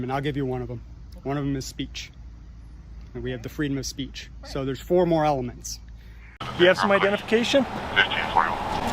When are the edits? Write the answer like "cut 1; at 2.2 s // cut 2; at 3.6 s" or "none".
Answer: cut 1; at 6.5 s